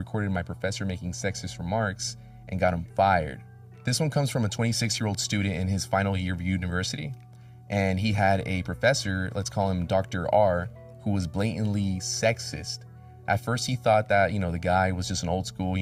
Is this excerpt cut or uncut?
uncut